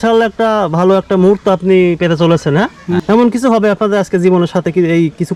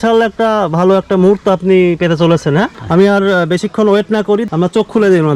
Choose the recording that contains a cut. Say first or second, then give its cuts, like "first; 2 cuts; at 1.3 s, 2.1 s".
second; 2 cuts; at 2.8 s, 4.4 s